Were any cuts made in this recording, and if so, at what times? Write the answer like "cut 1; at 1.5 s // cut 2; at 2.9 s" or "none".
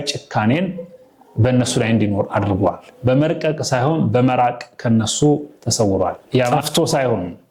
cut 1; at 2.9 s // cut 2; at 6.5 s